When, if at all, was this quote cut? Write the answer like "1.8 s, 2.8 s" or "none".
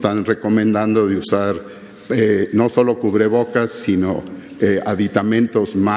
none

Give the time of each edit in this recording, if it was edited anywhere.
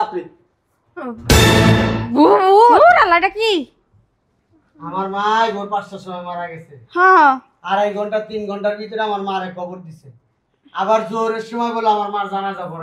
none

